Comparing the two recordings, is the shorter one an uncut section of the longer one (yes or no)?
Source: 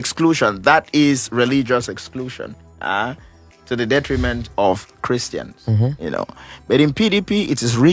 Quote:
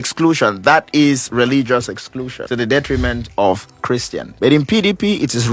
no